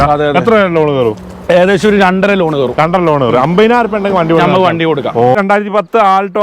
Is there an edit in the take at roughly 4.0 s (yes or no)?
no